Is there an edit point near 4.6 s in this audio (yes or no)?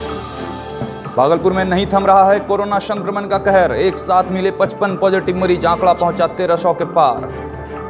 no